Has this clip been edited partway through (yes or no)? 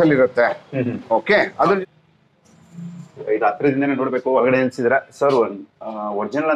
yes